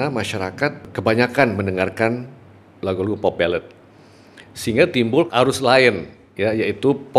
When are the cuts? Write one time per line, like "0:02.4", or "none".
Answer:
0:00.9
0:05.3